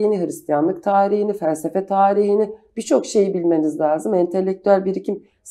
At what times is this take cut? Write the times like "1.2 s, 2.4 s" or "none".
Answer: none